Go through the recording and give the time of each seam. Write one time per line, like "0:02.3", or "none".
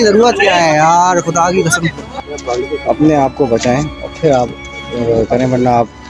0:02.2

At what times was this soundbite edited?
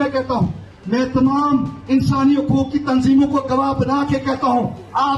none

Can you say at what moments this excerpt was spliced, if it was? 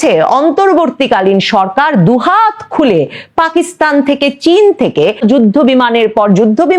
0:05.2

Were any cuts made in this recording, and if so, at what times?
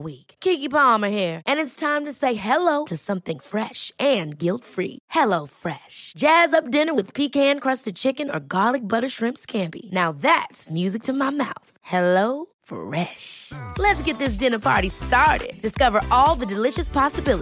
none

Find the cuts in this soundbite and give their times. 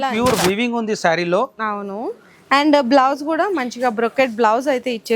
none

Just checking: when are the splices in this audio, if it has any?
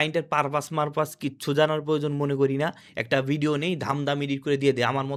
none

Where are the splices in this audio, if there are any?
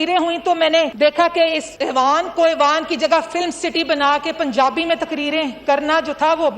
0:00.9
0:01.7

